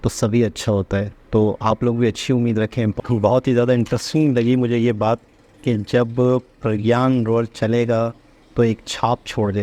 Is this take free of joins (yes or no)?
no